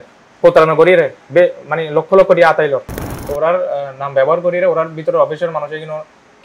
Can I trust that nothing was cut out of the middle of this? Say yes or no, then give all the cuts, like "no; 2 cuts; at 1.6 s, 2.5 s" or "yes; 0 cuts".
no; 1 cut; at 3.3 s